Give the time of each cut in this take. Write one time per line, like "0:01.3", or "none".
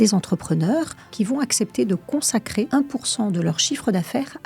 0:01.1
0:02.7

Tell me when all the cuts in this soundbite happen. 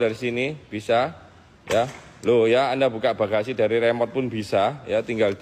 none

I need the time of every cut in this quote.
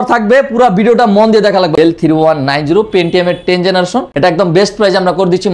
0:01.7
0:04.2

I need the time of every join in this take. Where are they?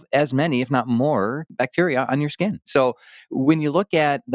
0:01.5
0:02.7

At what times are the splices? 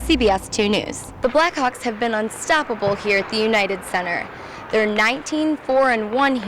none

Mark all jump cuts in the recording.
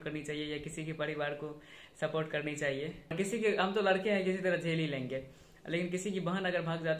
0:03.1

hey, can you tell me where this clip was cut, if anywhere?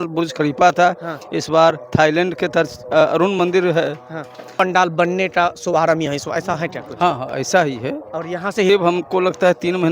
0:04.5
0:08.7

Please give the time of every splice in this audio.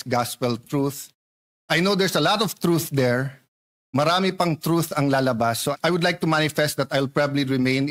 0:05.7

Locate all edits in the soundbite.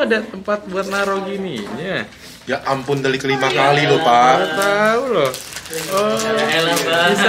none

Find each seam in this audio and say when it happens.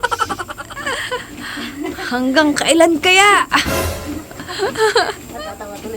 none

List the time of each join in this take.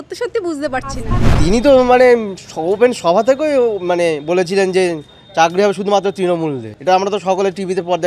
0:01.3
0:06.7

